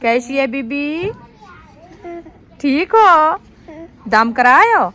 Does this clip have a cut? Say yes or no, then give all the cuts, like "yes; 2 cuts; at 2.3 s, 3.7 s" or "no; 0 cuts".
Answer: no; 0 cuts